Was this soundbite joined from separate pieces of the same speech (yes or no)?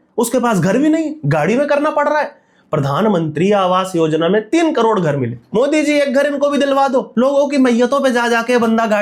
no